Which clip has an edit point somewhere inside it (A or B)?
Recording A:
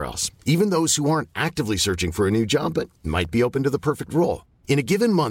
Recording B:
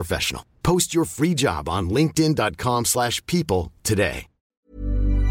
B